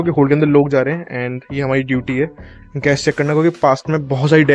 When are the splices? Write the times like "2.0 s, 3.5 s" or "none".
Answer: none